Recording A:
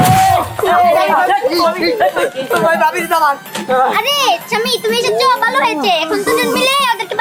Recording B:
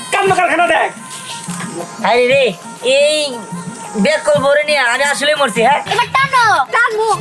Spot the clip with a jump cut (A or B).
B